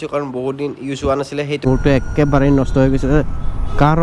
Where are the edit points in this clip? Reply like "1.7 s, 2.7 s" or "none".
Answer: 1.6 s